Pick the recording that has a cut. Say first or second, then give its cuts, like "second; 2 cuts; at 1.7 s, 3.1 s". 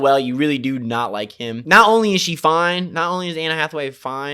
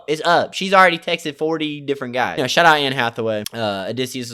first; 1 cut; at 1.6 s